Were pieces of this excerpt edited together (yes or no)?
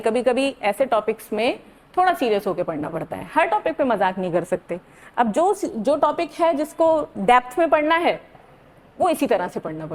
no